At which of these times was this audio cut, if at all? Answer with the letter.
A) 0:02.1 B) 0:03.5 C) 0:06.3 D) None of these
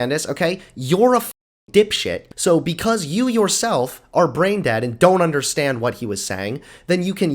A